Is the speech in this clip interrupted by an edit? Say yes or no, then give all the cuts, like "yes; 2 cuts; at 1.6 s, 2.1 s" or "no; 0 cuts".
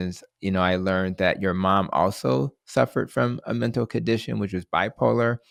no; 0 cuts